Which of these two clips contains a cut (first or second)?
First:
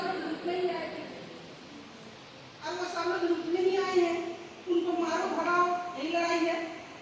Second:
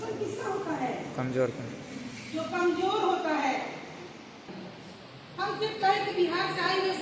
second